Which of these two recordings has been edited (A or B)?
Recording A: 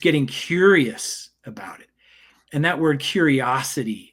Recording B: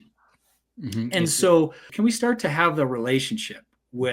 B